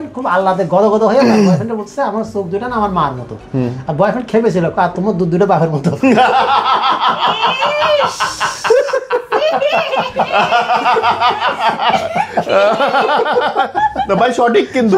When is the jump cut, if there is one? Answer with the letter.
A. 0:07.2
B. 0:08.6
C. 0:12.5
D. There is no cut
D